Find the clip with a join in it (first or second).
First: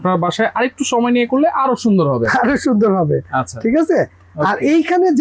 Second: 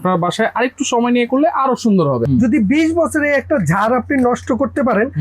second